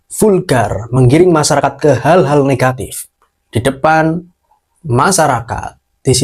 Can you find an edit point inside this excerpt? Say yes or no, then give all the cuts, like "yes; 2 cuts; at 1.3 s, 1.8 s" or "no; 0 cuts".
no; 0 cuts